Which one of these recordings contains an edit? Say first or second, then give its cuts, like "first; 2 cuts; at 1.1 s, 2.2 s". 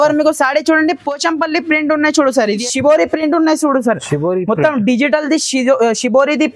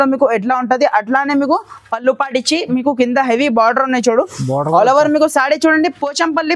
first; 1 cut; at 2.6 s